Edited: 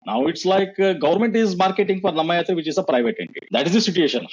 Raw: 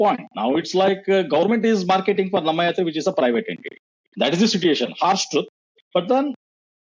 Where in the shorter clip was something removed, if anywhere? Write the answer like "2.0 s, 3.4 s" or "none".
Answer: 3.3 s

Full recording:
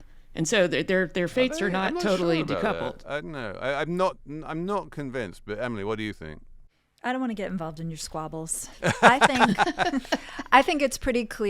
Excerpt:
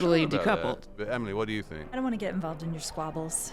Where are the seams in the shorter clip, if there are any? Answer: 0.8 s, 1.9 s

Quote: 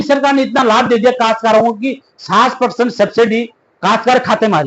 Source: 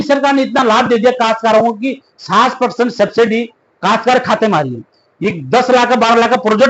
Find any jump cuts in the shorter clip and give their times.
none

